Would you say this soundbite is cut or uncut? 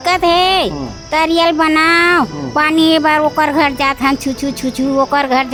uncut